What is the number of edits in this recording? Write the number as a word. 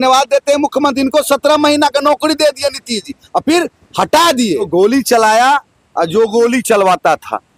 one